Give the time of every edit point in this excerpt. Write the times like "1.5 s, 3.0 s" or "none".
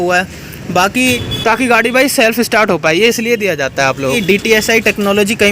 1.2 s, 4.2 s

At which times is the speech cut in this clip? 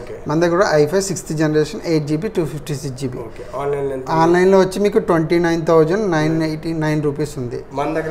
none

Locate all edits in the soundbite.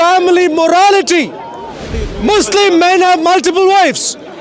1.9 s

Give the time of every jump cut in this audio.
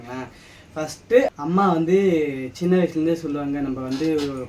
1.3 s

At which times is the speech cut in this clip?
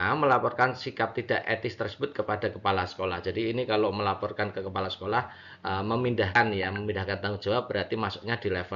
none

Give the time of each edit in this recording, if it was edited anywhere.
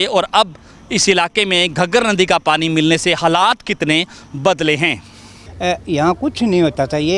none

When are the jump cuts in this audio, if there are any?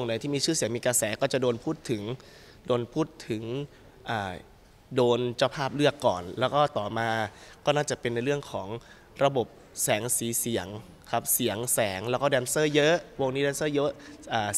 none

